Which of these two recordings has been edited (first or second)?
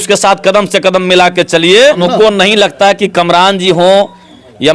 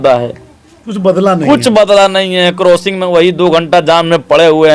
first